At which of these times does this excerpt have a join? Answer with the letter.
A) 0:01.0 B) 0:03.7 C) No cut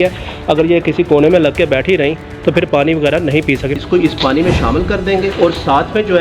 B